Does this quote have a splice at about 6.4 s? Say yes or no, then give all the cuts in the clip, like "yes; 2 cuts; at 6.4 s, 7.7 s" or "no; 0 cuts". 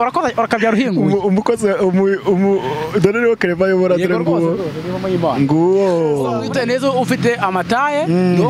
yes; 1 cut; at 6.4 s